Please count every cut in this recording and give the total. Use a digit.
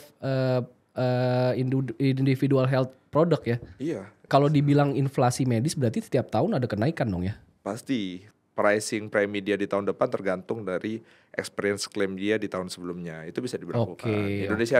2